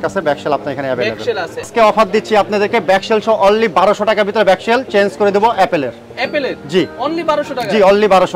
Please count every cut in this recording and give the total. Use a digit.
1